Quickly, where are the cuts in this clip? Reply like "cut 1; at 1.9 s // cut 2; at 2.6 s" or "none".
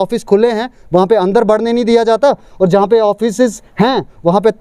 none